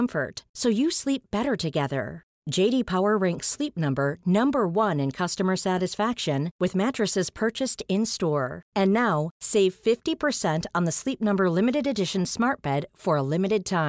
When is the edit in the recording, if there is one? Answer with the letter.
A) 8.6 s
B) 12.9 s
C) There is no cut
C